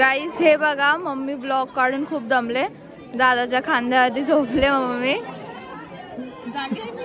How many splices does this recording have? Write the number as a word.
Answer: zero